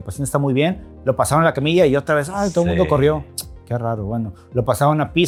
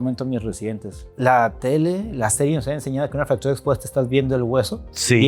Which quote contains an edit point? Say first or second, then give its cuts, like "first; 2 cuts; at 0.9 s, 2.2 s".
second; 1 cut; at 1.0 s